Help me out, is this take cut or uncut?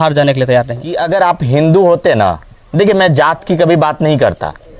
cut